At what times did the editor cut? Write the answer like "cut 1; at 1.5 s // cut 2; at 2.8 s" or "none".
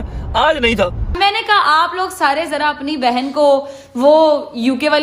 cut 1; at 1.1 s